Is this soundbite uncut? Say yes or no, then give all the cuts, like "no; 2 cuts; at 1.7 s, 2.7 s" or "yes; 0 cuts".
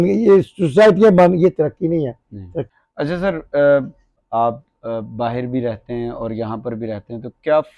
no; 2 cuts; at 2.7 s, 4.2 s